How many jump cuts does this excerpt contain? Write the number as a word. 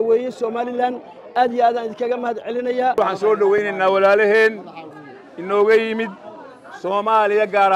one